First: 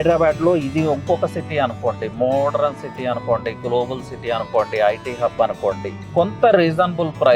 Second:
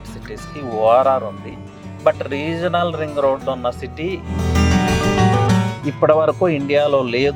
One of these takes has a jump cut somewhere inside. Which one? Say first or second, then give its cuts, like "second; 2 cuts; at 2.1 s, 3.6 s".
first; 1 cut; at 6.0 s